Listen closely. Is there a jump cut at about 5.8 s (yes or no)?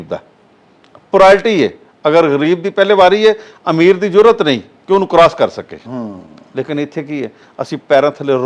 no